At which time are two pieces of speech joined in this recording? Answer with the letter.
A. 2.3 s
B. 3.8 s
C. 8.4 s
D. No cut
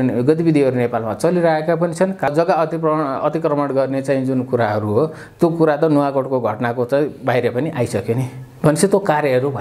A